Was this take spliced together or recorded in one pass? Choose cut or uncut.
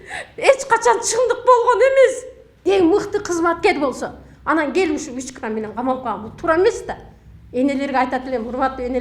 cut